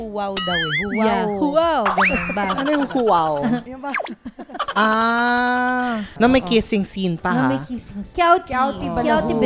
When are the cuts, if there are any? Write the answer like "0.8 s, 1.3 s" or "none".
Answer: 3.7 s, 6.1 s, 8.0 s